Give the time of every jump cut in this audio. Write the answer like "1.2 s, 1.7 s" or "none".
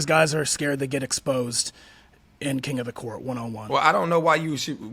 3.6 s